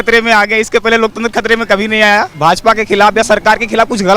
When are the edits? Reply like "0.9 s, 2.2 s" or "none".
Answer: 2.3 s